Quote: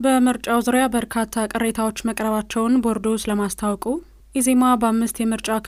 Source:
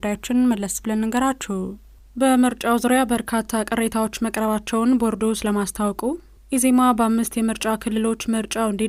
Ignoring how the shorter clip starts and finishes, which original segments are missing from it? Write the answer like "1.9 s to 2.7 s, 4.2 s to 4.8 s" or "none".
none